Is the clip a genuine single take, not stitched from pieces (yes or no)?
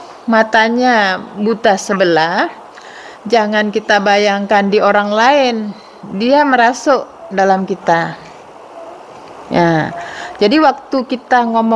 yes